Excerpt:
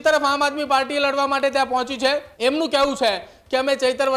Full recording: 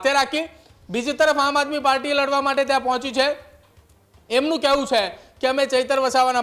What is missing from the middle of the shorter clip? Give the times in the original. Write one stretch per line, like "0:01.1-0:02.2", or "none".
0:03.4-0:04.2